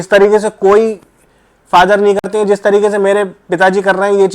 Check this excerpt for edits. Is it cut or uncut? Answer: uncut